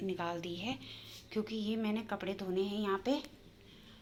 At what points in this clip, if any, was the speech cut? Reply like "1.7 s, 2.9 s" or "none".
none

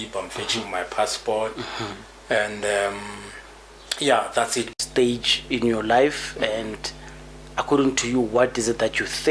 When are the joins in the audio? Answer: 4.7 s

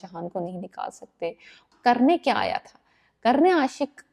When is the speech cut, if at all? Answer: 1.6 s

